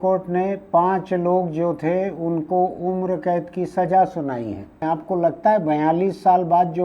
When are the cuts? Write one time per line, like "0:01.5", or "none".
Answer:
0:04.9